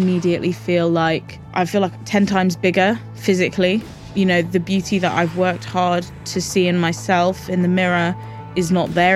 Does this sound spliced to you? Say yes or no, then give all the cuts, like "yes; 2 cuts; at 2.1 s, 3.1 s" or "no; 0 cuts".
yes; 2 cuts; at 1.4 s, 4.0 s